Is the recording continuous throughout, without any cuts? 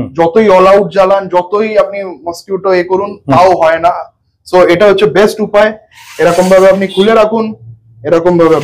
yes; 0 cuts

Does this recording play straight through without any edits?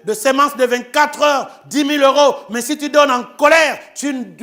yes; 0 cuts

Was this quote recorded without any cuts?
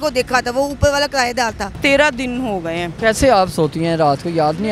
no; 2 cuts; at 1.8 s, 2.9 s

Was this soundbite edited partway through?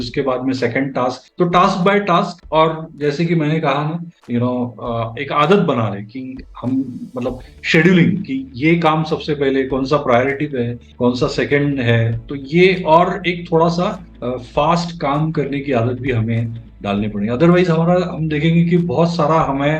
yes; 1 cut; at 4.1 s

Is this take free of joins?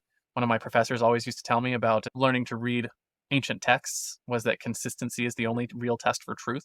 yes; 0 cuts

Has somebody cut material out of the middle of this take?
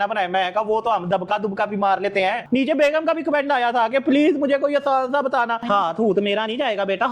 yes; 2 cuts; at 2.4 s, 5.6 s

